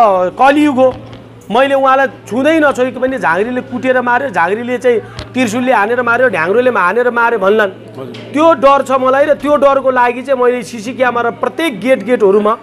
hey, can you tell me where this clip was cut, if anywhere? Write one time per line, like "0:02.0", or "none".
none